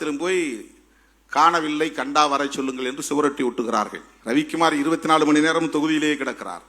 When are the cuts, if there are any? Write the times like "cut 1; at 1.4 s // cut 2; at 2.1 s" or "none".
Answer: cut 1; at 4.1 s